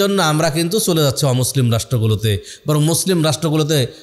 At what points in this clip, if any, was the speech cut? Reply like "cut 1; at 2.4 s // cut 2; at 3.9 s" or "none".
none